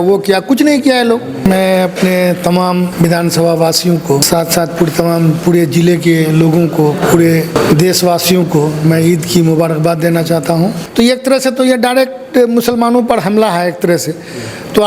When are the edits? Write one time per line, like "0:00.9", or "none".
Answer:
0:01.4
0:02.9
0:04.2
0:07.5
0:10.8

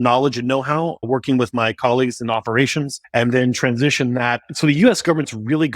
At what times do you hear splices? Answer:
0:01.0
0:03.0
0:04.5

